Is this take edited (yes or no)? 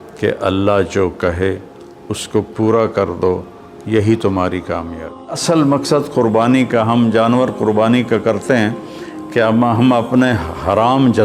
yes